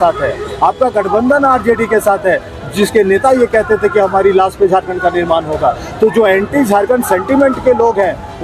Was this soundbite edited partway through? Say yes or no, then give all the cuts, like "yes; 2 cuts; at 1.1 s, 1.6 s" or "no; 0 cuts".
no; 0 cuts